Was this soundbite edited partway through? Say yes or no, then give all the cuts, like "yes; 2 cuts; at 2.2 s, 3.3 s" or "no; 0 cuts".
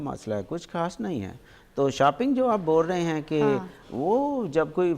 no; 0 cuts